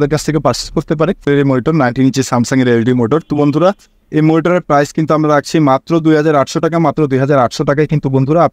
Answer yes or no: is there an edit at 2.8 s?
no